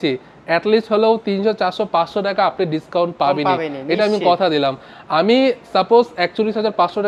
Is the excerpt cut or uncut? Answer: uncut